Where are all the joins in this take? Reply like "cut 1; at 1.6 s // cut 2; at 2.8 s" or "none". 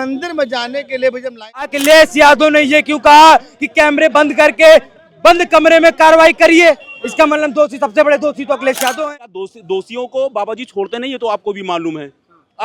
cut 1; at 1.7 s // cut 2; at 9.0 s